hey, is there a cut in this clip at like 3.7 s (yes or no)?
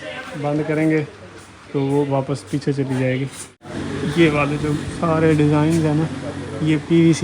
yes